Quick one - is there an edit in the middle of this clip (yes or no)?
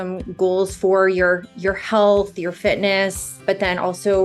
yes